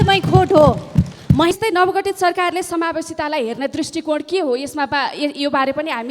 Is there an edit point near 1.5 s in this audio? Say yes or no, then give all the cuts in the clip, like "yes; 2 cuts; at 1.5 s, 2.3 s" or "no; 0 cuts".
yes; 1 cut; at 1.5 s